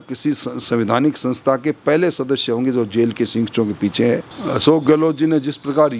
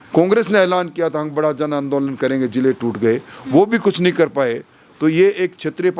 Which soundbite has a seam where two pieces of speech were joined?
first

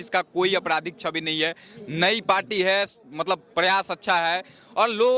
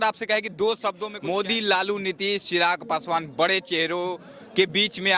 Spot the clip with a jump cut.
second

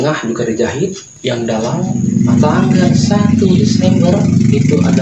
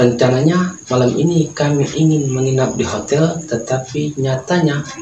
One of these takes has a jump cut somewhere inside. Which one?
first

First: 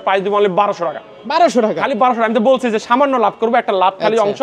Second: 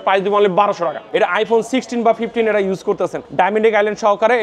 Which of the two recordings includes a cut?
second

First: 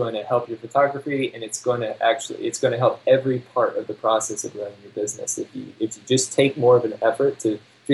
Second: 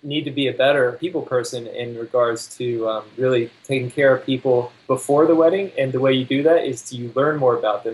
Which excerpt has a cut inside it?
second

